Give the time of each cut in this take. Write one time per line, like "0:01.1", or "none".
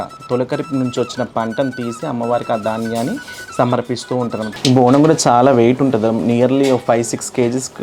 0:04.5